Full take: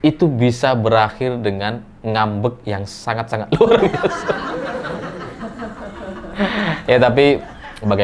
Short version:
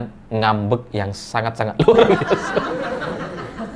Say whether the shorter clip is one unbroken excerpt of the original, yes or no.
no